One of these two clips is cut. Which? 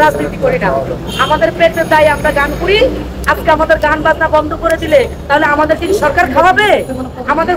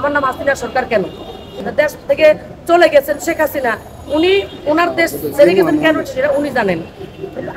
second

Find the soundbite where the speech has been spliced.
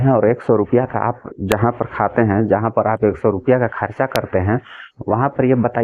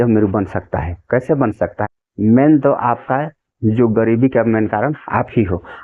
second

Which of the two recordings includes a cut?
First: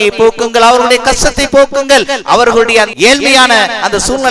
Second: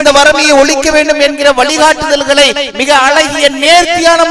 first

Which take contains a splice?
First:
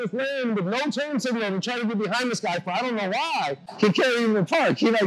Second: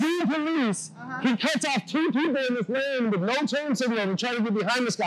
first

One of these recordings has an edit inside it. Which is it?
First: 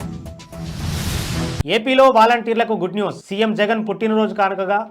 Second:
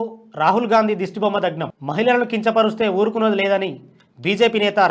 first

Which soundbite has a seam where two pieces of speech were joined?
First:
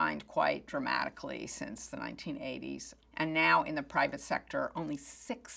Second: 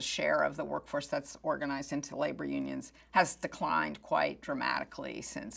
first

